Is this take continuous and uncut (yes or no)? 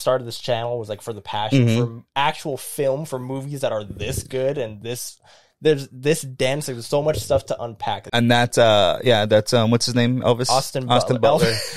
no